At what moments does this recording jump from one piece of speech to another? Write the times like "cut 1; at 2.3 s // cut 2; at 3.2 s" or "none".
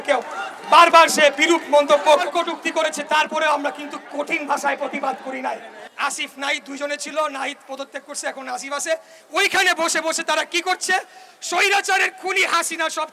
cut 1; at 5.8 s

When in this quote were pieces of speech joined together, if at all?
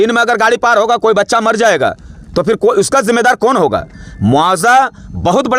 none

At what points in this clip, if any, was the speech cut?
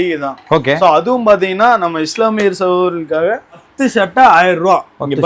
cut 1; at 3.6 s

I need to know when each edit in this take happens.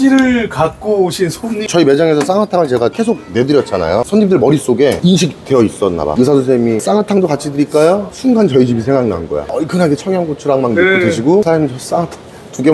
cut 1; at 1.6 s // cut 2; at 4.0 s // cut 3; at 6.1 s // cut 4; at 9.5 s

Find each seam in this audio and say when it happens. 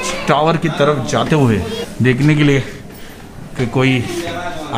cut 1; at 1.8 s

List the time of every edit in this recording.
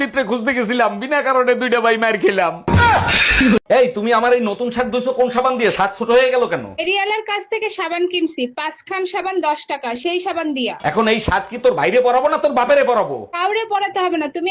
cut 1; at 3.6 s

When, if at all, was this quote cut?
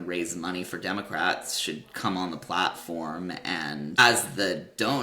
cut 1; at 4.0 s

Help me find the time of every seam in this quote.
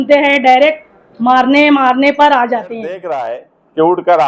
cut 1; at 3.1 s

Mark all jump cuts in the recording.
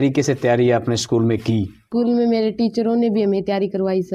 cut 1; at 1.8 s

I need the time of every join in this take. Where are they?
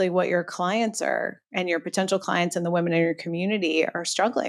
none

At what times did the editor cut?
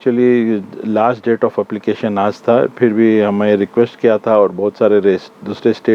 none

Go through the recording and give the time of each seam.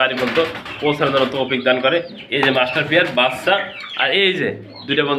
none

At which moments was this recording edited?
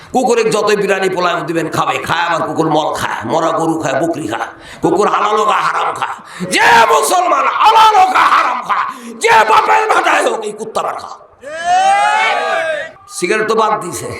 cut 1; at 12.9 s

